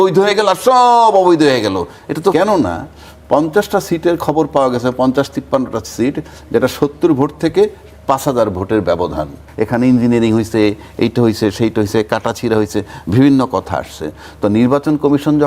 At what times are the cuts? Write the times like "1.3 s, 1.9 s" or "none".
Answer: 2.3 s, 9.5 s